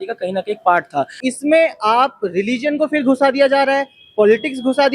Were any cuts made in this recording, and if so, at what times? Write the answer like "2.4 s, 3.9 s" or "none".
1.2 s